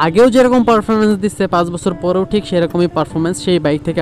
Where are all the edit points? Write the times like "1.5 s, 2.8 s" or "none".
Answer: none

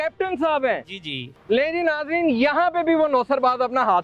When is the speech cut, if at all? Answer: none

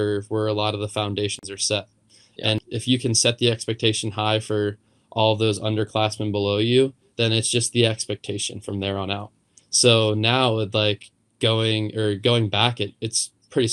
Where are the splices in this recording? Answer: 2.6 s

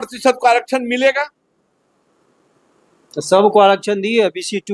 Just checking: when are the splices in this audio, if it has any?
none

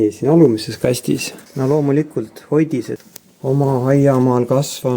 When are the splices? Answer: 1.4 s, 3.0 s

